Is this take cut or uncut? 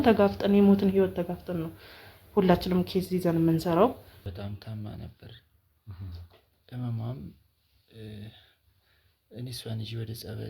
cut